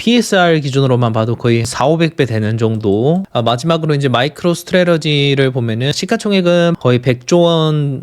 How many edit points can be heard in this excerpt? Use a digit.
4